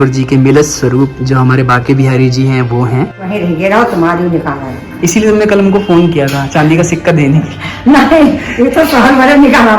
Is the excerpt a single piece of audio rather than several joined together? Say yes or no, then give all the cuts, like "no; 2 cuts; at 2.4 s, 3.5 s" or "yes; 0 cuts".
no; 1 cut; at 3.3 s